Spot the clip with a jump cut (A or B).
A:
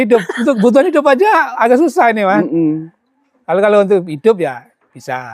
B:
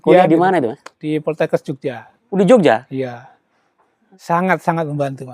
B